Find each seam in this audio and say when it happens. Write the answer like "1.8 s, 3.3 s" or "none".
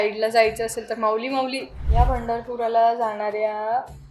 1.7 s